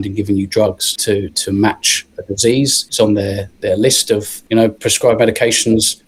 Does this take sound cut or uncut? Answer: uncut